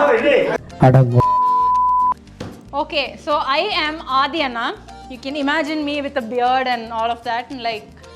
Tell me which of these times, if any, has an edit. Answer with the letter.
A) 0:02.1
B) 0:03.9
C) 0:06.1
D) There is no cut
A